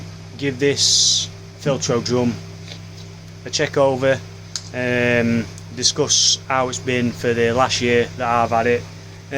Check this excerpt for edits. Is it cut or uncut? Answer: uncut